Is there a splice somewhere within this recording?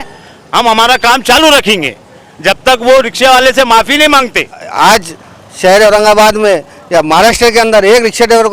yes; 1 cut; at 4.6 s

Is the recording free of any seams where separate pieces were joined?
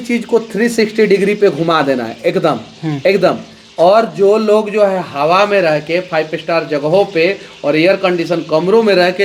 yes; 0 cuts

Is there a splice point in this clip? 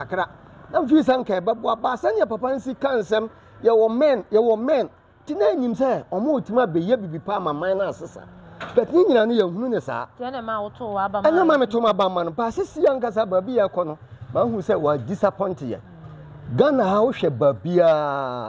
no; 0 cuts

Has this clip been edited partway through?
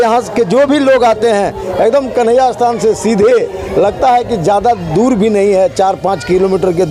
no; 0 cuts

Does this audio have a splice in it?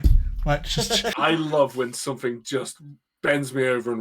yes; 1 cut; at 1.1 s

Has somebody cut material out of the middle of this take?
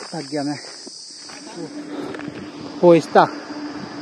no; 0 cuts

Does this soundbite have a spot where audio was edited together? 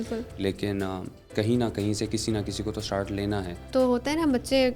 yes; 2 cuts; at 1.3 s, 3.7 s

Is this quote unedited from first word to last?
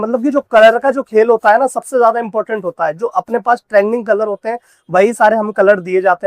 yes; 0 cuts

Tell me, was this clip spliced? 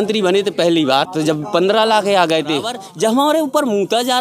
yes; 2 cuts; at 1.1 s, 2.8 s

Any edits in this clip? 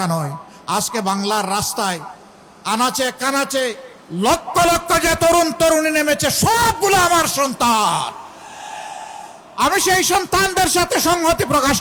no; 0 cuts

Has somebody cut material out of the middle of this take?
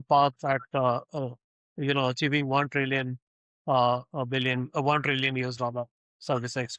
no; 0 cuts

